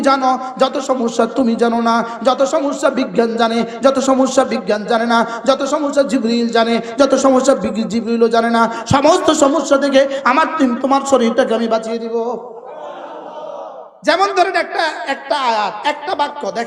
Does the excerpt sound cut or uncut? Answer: uncut